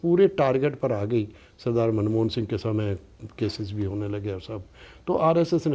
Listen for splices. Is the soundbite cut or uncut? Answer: uncut